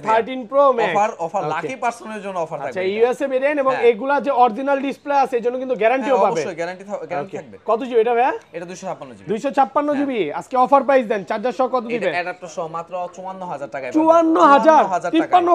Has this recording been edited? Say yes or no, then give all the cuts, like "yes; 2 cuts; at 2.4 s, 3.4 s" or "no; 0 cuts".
no; 0 cuts